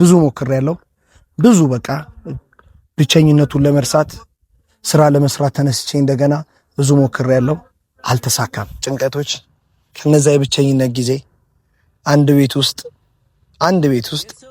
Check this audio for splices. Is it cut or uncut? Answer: cut